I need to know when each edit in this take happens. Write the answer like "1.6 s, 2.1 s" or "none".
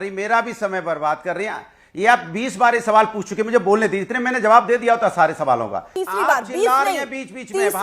6.0 s

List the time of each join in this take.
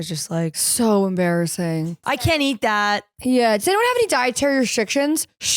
2.2 s

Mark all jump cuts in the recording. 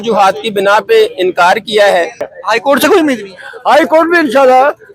2.3 s

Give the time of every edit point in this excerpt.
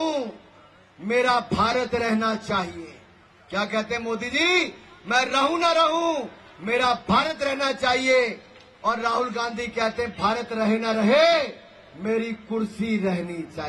none

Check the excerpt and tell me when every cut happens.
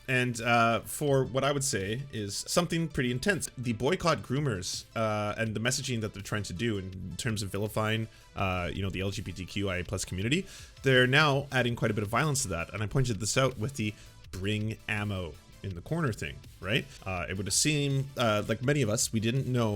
2.4 s, 3.5 s, 17.0 s

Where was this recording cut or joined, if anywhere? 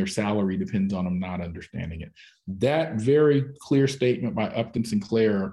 none

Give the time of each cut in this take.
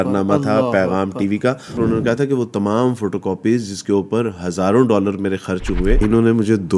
1.8 s, 6.0 s

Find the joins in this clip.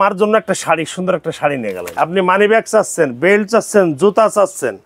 1.9 s

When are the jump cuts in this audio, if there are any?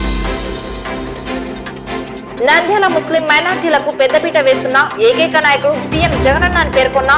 2.3 s

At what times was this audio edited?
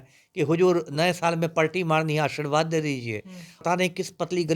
3.5 s

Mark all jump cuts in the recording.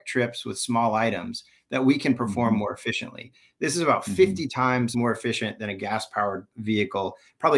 4.9 s, 6.5 s

